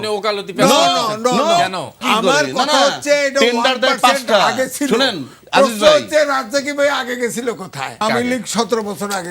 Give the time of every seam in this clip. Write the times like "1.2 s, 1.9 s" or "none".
2.0 s, 8.0 s